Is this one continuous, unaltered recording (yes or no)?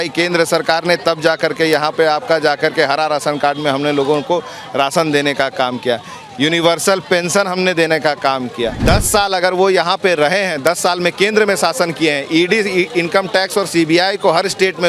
no